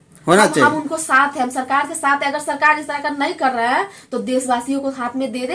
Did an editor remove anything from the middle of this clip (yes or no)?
no